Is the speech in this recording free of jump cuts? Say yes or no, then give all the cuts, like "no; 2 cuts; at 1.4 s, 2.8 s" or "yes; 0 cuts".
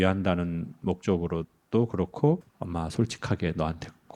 no; 1 cut; at 2.6 s